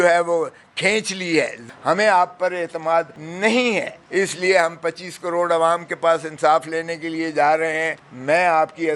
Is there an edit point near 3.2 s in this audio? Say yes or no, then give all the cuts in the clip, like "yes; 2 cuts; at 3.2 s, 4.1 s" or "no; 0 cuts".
yes; 3 cuts; at 1.6 s, 3.2 s, 4.0 s